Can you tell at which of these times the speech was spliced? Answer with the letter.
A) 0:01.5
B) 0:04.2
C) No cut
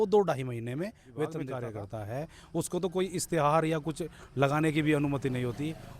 A